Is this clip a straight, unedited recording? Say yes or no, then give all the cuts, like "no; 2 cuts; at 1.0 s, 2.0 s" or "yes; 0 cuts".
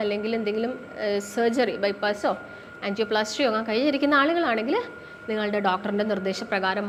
yes; 0 cuts